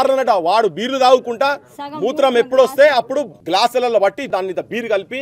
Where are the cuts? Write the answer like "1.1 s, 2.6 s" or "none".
3.4 s, 4.2 s